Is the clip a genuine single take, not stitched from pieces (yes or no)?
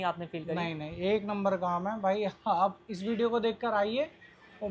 yes